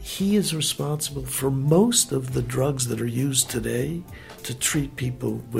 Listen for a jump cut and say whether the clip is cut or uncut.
uncut